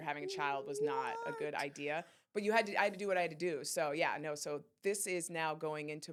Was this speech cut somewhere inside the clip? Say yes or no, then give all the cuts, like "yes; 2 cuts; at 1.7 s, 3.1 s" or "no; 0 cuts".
no; 0 cuts